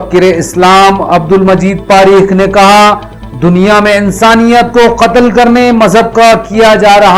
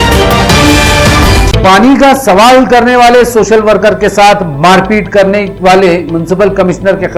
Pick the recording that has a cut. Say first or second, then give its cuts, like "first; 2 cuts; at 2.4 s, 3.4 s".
second; 1 cut; at 1.0 s